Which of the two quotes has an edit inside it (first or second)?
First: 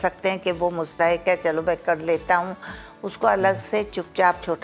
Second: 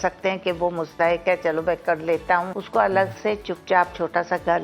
second